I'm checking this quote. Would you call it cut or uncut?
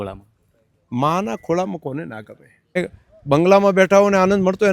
cut